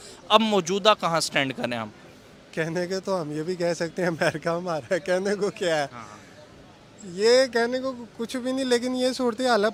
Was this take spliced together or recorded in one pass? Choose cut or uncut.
uncut